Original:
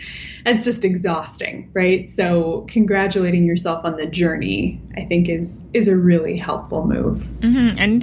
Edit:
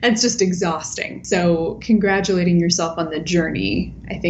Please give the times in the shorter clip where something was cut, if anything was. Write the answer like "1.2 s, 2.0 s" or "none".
1.2 s